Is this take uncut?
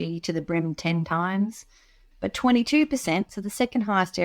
yes; 0 cuts

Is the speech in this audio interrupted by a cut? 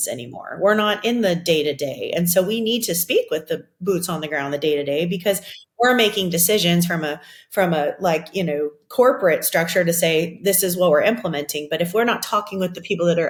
no; 0 cuts

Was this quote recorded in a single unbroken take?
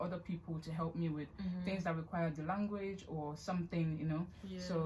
yes; 0 cuts

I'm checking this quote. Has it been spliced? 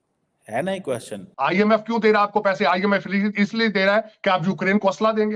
yes; 1 cut; at 1.2 s

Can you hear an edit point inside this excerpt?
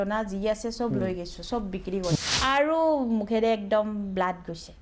yes; 1 cut; at 2.1 s

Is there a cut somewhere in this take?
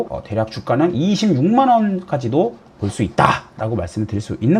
no; 0 cuts

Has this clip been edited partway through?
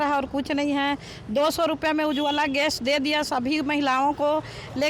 no; 0 cuts

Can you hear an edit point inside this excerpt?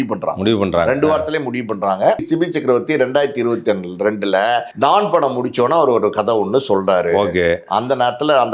yes; 2 cuts; at 2.2 s, 4.7 s

